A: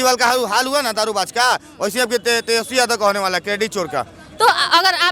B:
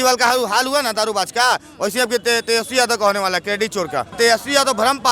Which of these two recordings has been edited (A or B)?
B